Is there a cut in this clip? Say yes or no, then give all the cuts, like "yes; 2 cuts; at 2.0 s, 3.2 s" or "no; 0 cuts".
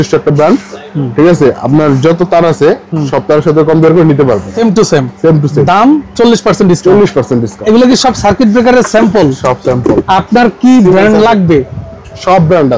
yes; 3 cuts; at 4.5 s, 7.5 s, 10.0 s